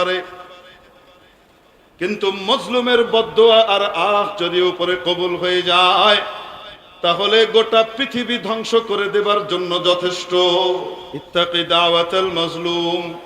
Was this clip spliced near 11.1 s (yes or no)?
yes